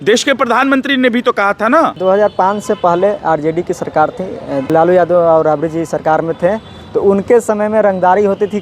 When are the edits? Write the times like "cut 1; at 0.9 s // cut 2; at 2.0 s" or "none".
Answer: cut 1; at 2.0 s // cut 2; at 4.7 s